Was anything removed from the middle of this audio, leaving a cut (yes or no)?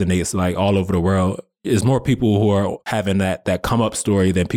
no